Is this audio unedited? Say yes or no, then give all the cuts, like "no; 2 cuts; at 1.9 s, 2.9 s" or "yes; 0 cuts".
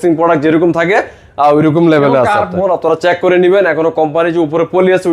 no; 1 cut; at 2.5 s